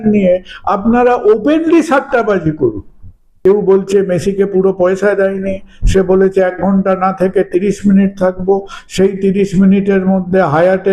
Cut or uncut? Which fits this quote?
cut